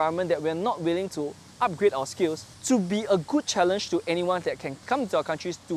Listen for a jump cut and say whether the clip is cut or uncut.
cut